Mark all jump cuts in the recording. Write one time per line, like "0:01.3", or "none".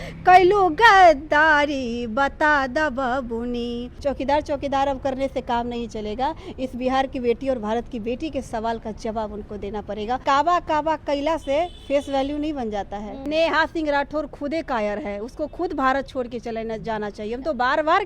0:03.9
0:10.2
0:13.1